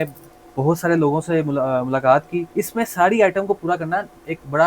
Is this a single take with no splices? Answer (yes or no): no